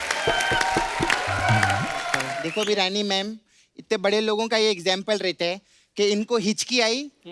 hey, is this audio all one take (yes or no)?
no